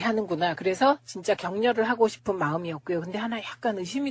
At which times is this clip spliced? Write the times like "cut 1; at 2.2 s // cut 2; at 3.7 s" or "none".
cut 1; at 2.8 s

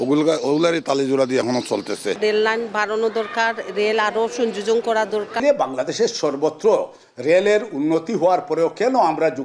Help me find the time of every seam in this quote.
cut 1; at 2.2 s // cut 2; at 5.4 s

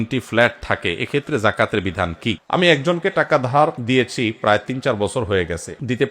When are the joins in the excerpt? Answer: cut 1; at 2.4 s

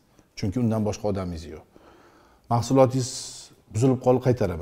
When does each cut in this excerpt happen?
none

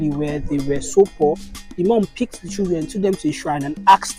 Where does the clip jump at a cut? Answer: none

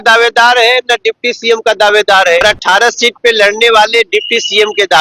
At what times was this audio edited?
cut 1; at 2.4 s

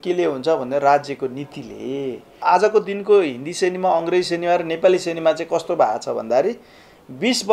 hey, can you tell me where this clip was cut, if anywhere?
cut 1; at 2.4 s

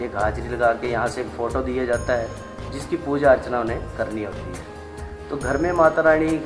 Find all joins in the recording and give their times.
none

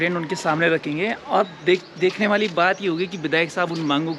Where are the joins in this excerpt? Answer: none

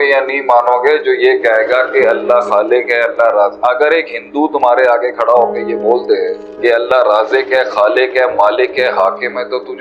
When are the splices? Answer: cut 1; at 6.4 s

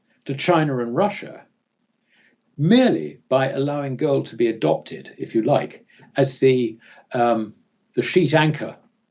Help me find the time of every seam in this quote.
none

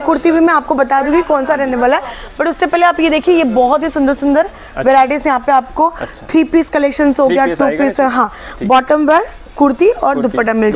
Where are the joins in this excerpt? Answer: none

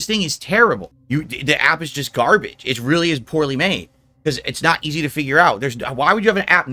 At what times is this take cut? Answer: cut 1; at 0.9 s

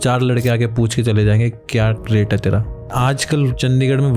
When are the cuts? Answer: cut 1; at 2.0 s // cut 2; at 2.9 s

